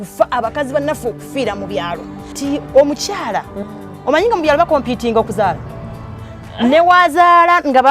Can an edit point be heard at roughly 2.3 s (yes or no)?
yes